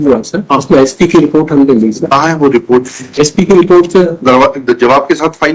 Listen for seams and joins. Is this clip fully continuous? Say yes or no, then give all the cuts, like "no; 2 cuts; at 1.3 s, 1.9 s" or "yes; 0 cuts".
yes; 0 cuts